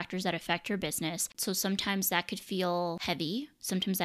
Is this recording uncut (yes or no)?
no